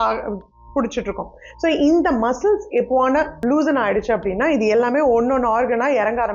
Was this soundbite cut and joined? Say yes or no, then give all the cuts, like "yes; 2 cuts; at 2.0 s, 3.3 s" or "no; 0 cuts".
yes; 1 cut; at 3.4 s